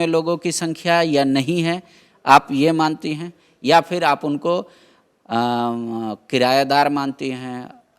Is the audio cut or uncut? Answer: uncut